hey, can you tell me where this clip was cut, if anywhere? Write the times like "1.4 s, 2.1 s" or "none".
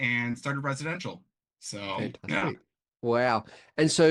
none